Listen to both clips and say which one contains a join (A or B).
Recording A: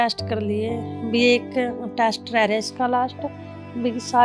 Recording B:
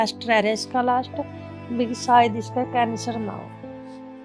B